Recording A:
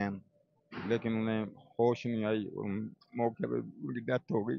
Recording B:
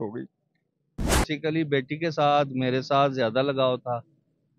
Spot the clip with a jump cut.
B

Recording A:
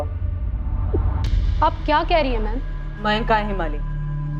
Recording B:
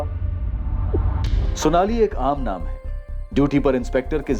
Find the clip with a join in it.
B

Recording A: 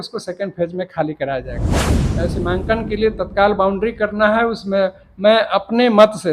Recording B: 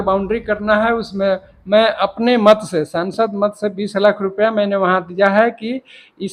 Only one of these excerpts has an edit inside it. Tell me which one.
A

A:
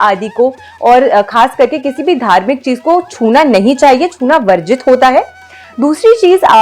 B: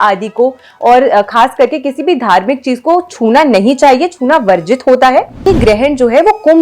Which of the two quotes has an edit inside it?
B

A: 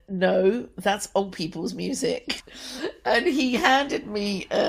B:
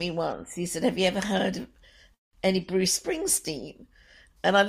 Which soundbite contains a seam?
A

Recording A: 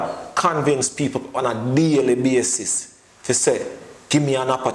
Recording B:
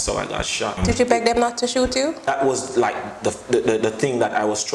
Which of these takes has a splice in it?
B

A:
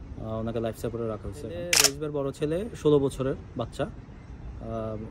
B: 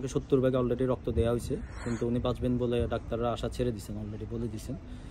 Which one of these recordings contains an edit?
A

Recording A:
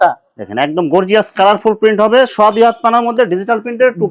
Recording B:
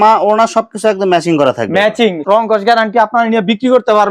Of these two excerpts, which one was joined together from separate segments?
B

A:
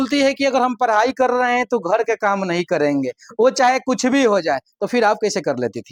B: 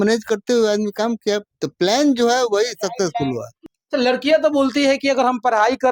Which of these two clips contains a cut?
B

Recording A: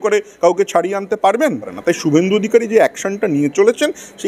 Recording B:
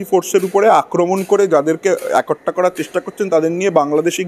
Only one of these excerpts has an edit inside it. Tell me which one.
A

